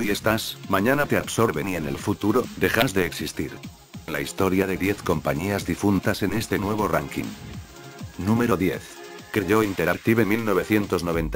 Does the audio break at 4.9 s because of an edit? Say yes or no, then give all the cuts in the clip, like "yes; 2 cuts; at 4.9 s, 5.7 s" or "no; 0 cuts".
yes; 1 cut; at 4.9 s